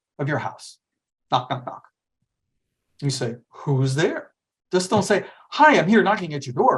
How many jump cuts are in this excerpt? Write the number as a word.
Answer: zero